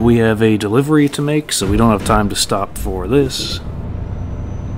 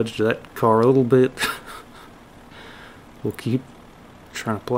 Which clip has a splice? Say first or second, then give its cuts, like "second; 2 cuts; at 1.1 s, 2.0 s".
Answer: first; 1 cut; at 3.3 s